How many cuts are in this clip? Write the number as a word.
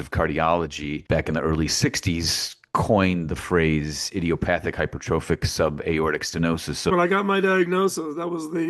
two